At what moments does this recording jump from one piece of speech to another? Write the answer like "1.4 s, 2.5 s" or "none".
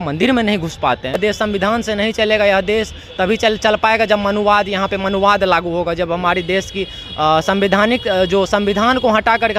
1.2 s